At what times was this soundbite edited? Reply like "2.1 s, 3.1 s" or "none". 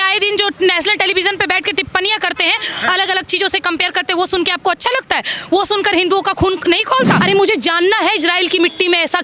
7.2 s